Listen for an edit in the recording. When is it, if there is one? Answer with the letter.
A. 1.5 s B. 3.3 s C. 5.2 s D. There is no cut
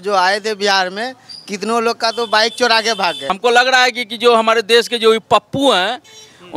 B